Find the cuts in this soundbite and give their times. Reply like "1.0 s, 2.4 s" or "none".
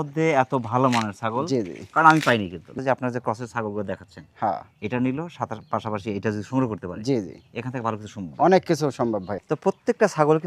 2.7 s, 9.3 s